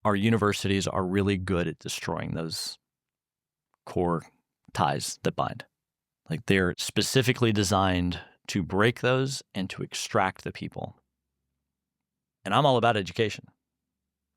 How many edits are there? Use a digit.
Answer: 1